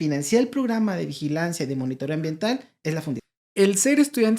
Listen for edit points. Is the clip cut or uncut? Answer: cut